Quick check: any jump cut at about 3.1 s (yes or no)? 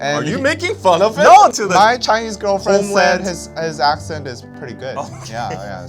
no